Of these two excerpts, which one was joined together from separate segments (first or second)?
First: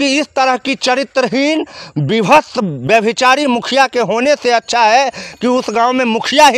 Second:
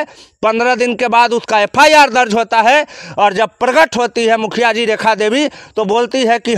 second